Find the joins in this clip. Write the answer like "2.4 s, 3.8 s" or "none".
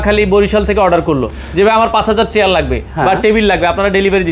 none